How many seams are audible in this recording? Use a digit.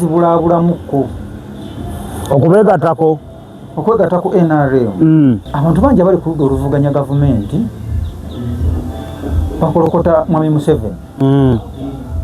1